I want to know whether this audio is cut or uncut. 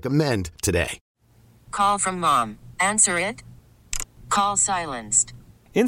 cut